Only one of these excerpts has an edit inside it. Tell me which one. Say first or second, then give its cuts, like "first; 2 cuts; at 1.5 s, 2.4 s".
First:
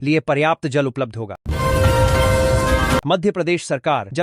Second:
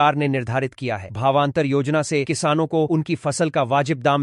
first; 2 cuts; at 1.4 s, 3.0 s